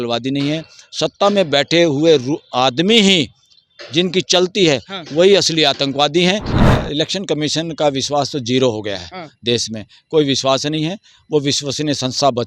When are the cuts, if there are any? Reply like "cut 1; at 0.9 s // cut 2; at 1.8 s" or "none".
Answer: cut 1; at 6.5 s